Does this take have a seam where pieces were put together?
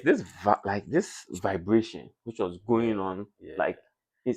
yes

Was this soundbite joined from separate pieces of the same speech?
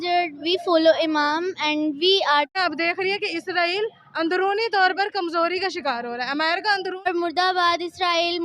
yes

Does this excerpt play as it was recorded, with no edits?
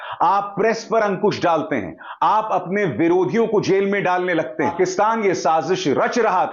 no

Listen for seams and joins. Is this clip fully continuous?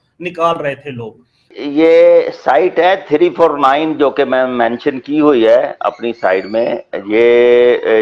no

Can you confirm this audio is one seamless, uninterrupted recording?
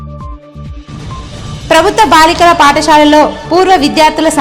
no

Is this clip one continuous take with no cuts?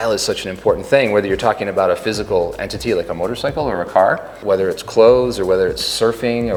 yes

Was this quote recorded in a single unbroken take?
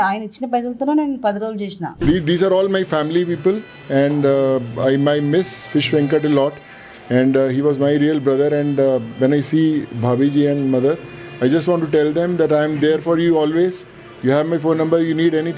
no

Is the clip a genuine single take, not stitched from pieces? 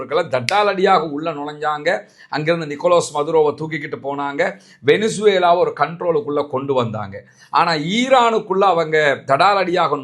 yes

